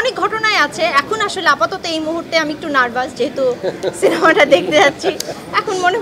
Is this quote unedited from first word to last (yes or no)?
yes